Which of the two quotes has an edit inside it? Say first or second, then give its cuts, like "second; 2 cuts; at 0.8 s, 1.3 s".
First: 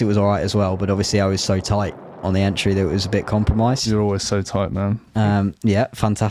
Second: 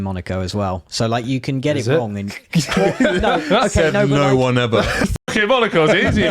second; 1 cut; at 5.1 s